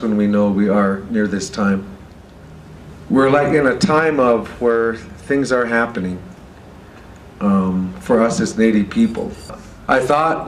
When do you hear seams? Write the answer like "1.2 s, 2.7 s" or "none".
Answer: none